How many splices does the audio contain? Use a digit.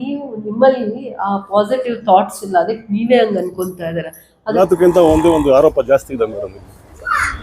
1